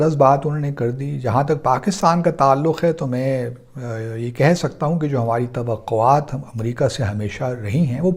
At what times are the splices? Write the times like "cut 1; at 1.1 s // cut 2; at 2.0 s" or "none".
none